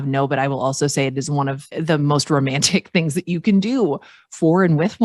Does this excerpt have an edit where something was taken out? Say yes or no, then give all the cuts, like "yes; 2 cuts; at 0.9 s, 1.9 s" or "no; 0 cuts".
yes; 1 cut; at 1.6 s